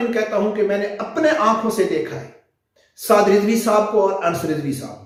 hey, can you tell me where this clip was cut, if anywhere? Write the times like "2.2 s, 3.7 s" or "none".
none